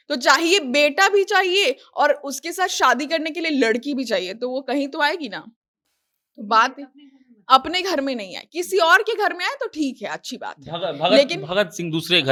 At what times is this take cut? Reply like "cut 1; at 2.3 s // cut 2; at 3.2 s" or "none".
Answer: none